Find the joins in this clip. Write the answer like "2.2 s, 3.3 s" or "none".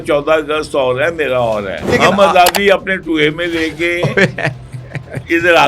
1.9 s